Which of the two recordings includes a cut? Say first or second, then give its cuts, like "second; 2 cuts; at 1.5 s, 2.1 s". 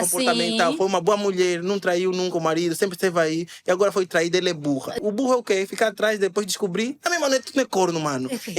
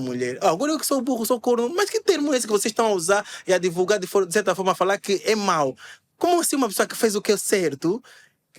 first; 1 cut; at 5.0 s